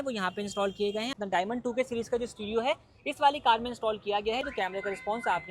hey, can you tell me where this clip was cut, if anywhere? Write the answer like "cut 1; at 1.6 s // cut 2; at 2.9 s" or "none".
cut 1; at 1.1 s // cut 2; at 4.4 s